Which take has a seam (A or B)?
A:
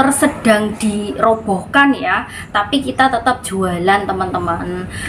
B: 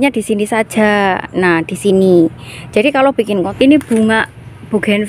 B